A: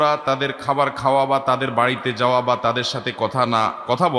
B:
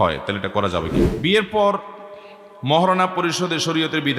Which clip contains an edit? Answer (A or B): B